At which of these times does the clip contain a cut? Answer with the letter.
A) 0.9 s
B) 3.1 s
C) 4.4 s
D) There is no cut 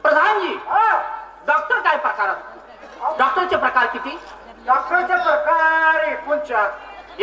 B